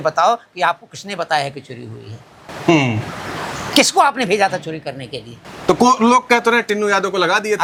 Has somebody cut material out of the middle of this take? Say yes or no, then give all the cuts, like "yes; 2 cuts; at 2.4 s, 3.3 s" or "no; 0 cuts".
no; 0 cuts